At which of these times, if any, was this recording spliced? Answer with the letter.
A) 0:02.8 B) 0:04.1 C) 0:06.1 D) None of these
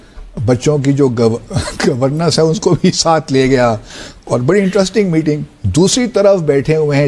D